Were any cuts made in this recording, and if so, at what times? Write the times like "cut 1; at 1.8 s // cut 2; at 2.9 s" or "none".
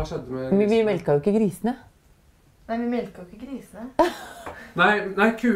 none